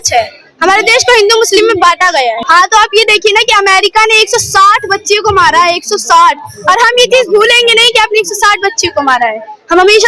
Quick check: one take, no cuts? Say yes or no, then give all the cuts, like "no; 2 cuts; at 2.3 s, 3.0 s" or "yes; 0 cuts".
no; 1 cut; at 2.4 s